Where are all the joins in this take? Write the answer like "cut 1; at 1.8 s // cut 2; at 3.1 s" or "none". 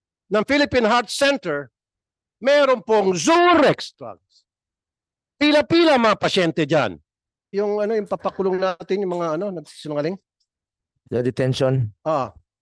cut 1; at 7.5 s